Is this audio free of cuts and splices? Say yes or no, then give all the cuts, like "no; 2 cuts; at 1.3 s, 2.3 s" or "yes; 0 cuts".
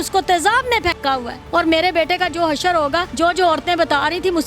no; 2 cuts; at 1.3 s, 3.1 s